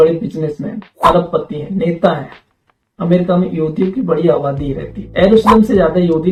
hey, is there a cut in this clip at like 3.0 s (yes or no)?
no